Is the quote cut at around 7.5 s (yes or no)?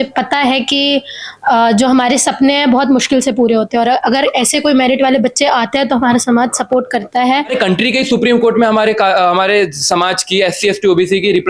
yes